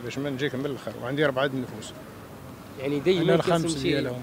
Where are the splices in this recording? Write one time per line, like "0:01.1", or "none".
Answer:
none